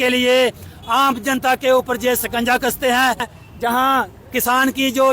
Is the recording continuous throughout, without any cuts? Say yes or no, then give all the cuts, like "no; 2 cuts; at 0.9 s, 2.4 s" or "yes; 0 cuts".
no; 1 cut; at 3.3 s